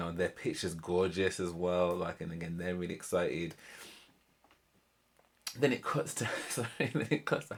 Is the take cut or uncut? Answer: uncut